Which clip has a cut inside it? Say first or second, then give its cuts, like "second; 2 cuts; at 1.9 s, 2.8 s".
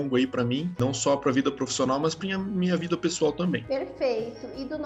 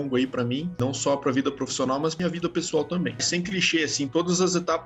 second; 2 cuts; at 2.2 s, 3.2 s